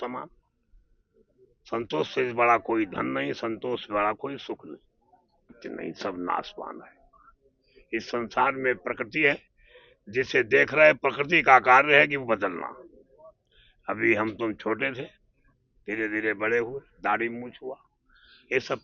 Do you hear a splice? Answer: yes; 1 cut; at 5.5 s

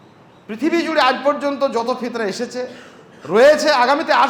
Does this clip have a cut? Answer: no; 0 cuts

